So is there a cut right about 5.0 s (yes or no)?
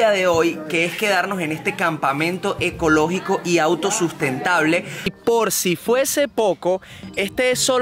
yes